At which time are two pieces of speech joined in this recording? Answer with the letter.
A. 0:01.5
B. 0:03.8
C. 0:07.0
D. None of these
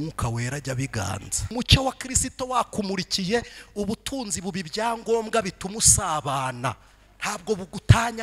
A